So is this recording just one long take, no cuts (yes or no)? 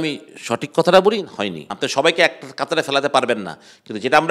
no